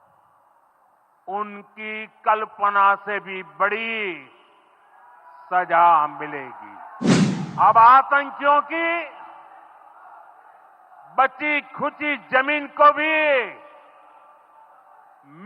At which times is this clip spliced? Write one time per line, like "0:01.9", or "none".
0:07.1